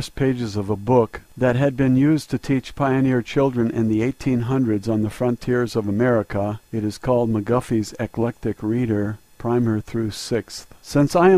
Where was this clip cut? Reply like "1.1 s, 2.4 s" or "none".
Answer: none